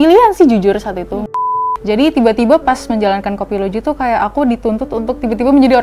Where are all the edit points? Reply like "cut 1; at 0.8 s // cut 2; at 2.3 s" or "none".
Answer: cut 1; at 1.4 s